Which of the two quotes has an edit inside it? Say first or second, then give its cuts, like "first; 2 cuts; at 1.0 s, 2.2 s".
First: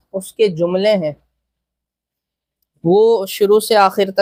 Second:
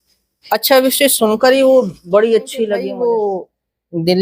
second; 1 cut; at 2.9 s